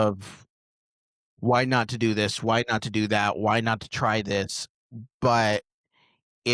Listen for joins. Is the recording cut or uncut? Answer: uncut